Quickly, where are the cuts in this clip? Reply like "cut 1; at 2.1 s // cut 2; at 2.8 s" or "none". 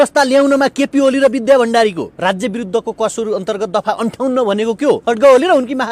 cut 1; at 2.1 s // cut 2; at 5.0 s